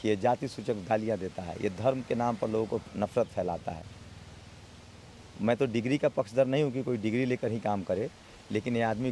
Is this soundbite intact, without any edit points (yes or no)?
yes